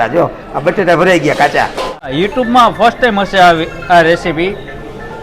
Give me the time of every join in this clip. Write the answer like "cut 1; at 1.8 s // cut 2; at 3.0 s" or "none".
cut 1; at 2.1 s